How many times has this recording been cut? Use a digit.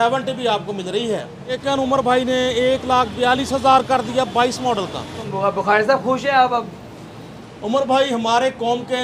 2